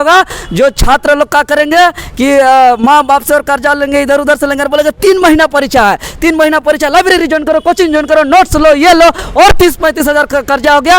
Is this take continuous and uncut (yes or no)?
yes